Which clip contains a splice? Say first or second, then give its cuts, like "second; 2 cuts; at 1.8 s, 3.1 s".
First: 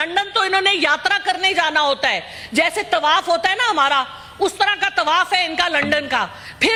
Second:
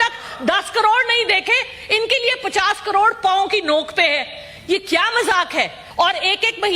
second; 1 cut; at 5.8 s